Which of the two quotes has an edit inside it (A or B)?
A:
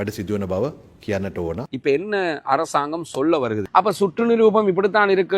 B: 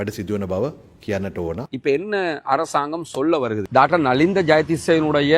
A